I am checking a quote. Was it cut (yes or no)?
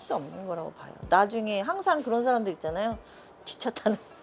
no